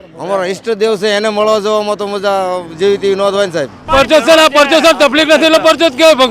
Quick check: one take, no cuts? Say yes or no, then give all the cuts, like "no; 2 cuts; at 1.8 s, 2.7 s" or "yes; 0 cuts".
no; 1 cut; at 3.8 s